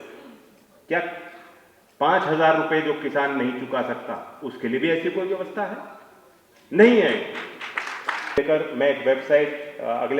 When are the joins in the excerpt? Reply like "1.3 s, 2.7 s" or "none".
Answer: 8.4 s